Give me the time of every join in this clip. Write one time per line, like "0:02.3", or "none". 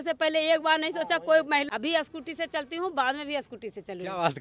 0:01.7